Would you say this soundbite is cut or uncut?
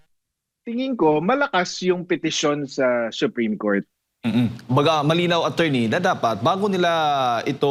uncut